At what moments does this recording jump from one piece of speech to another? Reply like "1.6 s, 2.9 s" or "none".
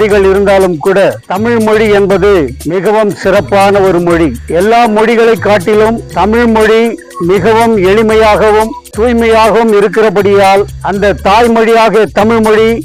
none